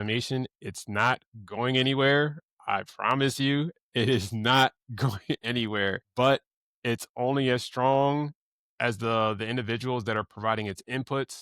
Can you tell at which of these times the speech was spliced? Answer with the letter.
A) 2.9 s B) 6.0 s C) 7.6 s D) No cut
B